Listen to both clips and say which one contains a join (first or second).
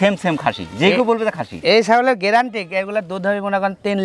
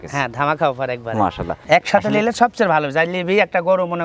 second